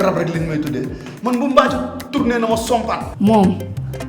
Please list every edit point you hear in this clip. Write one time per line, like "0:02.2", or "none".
0:03.0

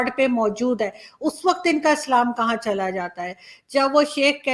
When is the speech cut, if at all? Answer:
none

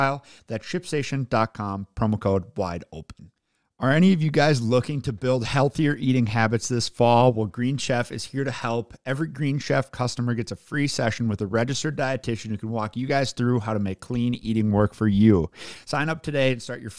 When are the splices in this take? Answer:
0:03.4

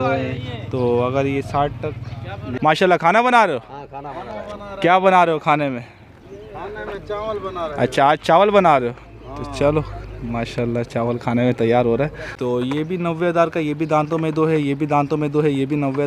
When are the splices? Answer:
0:02.6
0:12.3

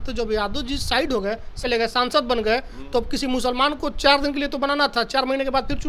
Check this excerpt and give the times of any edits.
0:01.6

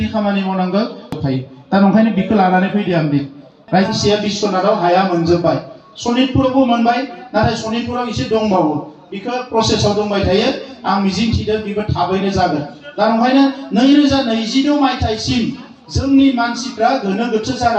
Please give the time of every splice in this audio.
0:03.9

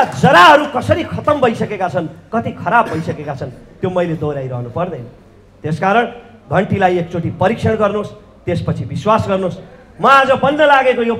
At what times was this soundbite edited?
none

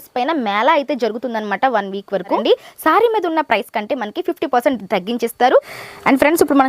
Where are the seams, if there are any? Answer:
0:02.4
0:05.8

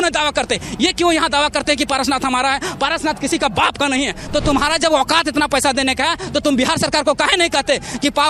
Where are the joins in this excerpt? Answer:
0:04.2

